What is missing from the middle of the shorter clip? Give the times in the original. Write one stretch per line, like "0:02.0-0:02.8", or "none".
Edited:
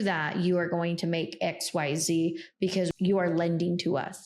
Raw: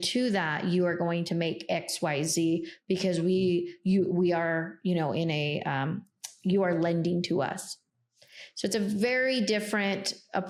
0:03.2-0:06.4